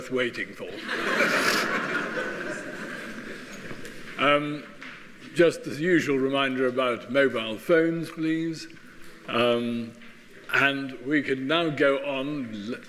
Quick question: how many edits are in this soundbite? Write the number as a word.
one